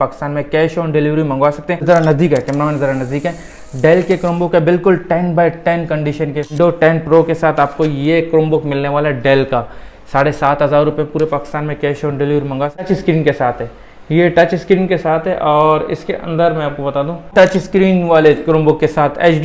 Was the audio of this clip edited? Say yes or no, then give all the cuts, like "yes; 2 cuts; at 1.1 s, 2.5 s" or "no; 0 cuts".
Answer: yes; 4 cuts; at 1.8 s, 6.5 s, 12.9 s, 17.3 s